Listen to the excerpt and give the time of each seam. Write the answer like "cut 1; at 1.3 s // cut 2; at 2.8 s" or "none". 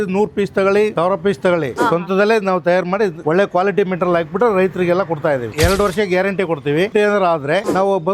cut 1; at 1.7 s // cut 2; at 5.5 s // cut 3; at 6.9 s